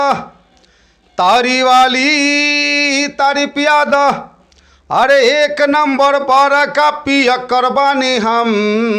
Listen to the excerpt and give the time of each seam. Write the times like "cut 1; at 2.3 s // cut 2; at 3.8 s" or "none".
none